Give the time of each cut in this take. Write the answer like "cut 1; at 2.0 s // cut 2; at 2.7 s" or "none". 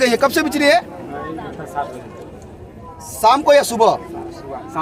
none